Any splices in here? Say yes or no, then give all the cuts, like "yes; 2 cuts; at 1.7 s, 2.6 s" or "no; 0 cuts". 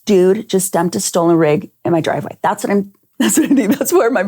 no; 0 cuts